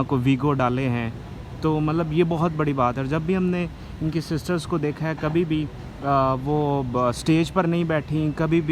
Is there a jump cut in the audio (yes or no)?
no